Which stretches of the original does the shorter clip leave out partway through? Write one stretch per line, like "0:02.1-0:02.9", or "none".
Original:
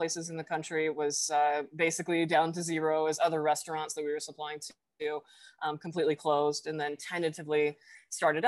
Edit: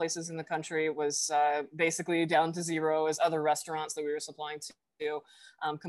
none